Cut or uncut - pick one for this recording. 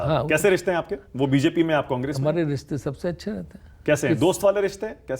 uncut